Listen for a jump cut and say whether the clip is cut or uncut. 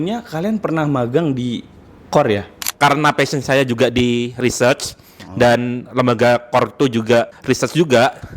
cut